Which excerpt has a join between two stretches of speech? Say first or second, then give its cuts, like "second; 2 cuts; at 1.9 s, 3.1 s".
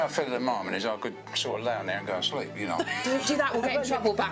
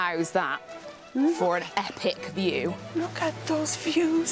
second; 1 cut; at 2.8 s